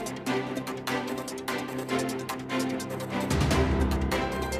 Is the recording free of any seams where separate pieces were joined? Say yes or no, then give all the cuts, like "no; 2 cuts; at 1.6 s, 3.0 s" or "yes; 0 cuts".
yes; 0 cuts